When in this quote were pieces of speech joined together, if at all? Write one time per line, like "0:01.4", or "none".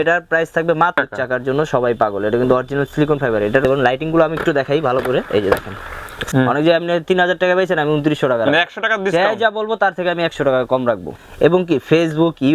0:01.0
0:03.6
0:06.2
0:11.1